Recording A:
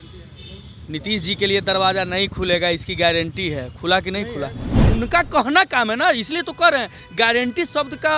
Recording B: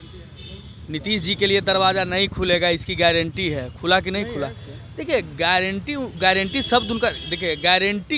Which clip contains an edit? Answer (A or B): A